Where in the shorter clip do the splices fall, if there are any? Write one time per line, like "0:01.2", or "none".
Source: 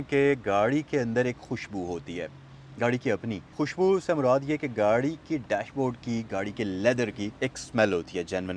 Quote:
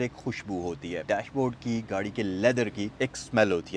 0:01.0